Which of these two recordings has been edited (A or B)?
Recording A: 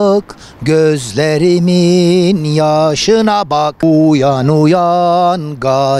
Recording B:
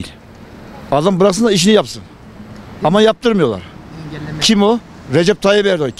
A